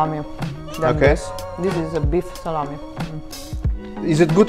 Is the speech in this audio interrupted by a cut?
no; 0 cuts

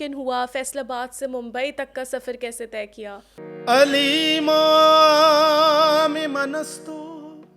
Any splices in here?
yes; 1 cut; at 3.3 s

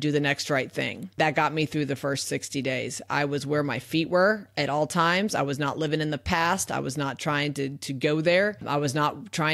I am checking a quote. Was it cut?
yes; 2 cuts; at 1.1 s, 8.6 s

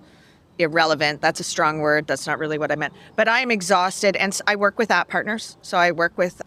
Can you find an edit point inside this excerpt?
no; 0 cuts

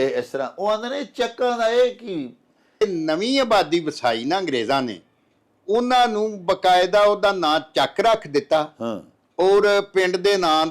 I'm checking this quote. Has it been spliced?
yes; 1 cut; at 2.8 s

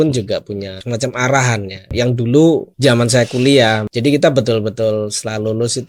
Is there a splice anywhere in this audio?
yes; 4 cuts; at 0.8 s, 1.9 s, 2.7 s, 3.9 s

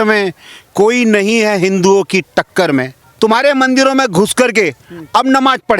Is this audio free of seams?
no; 1 cut; at 3.0 s

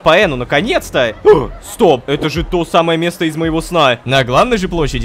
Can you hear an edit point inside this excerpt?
yes; 2 cuts; at 2.0 s, 4.0 s

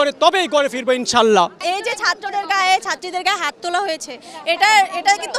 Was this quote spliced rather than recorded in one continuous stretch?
no; 0 cuts

